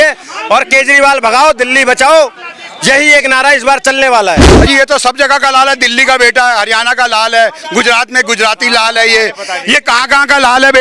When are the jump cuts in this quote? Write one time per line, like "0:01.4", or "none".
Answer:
0:04.5